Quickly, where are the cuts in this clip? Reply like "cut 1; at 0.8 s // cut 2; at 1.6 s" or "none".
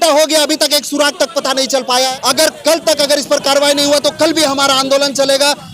cut 1; at 2.1 s